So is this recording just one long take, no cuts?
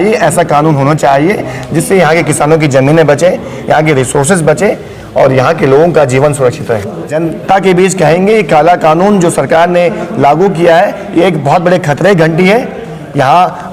no; 1 cut; at 7.1 s

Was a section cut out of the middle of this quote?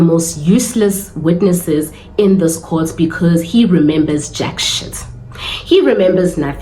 no; 0 cuts

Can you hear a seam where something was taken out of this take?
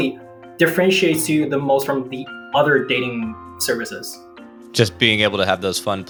no; 0 cuts

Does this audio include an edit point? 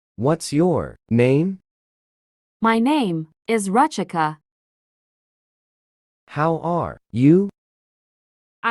yes; 1 cut; at 0.9 s

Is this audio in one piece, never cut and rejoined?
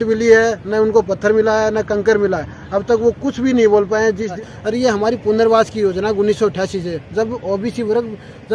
no; 1 cut; at 4.3 s

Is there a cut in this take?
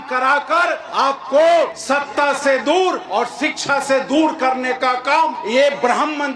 yes; 4 cuts; at 0.8 s, 1.8 s, 3.0 s, 5.4 s

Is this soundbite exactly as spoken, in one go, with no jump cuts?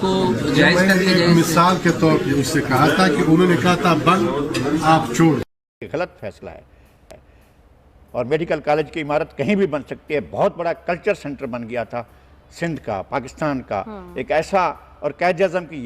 no; 1 cut; at 5.8 s

